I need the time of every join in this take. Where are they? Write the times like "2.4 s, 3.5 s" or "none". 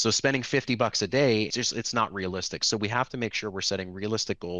1.5 s